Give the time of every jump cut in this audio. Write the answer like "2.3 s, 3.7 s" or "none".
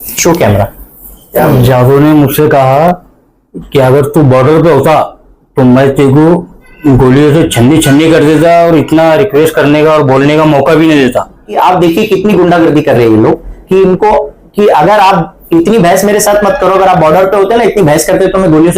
11.5 s